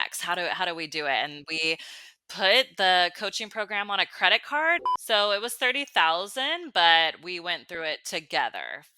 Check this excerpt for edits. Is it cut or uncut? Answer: cut